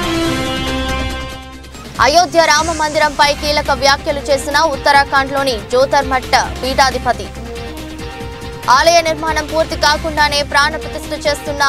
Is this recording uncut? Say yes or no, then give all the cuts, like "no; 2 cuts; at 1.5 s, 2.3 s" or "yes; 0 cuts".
yes; 0 cuts